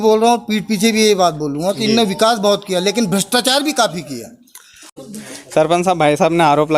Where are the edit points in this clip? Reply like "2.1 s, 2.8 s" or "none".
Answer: 4.8 s